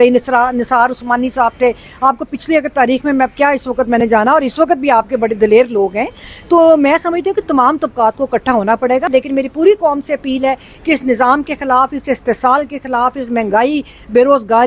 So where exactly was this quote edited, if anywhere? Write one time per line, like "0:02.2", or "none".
0:09.1

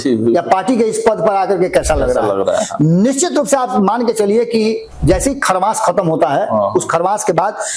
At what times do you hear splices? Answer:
none

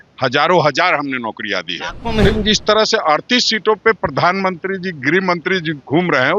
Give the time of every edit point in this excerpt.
0:02.3

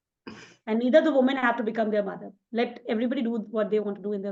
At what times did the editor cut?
none

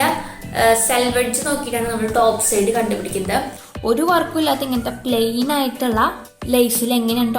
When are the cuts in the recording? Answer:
0:03.5
0:06.3

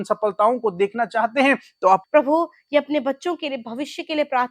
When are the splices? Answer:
0:02.0

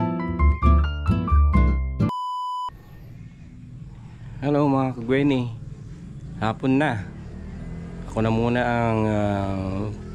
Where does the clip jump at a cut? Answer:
0:02.1

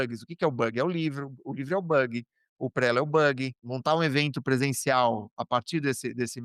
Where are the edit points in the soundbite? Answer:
0:03.6

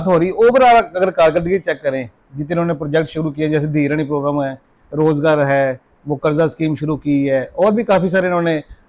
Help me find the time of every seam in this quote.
none

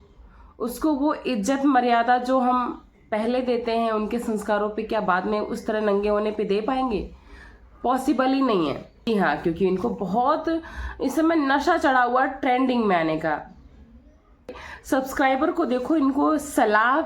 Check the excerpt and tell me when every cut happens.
0:09.1
0:14.5

